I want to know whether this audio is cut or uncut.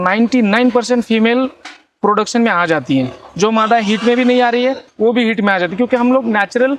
uncut